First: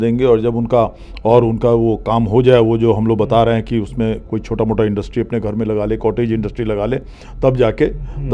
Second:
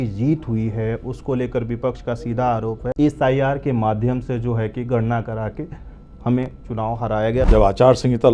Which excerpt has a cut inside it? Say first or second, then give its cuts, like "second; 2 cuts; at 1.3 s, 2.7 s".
second; 2 cuts; at 2.9 s, 7.5 s